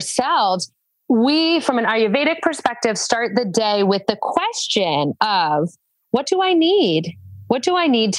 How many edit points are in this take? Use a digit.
0